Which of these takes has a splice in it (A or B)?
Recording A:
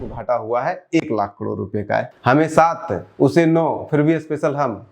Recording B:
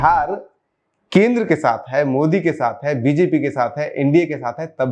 A